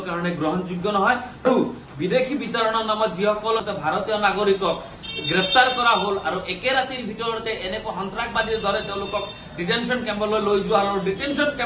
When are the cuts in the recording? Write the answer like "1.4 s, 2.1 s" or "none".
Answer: 1.4 s, 3.6 s